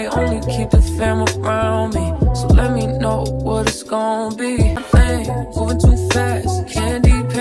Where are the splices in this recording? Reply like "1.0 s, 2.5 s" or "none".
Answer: 4.8 s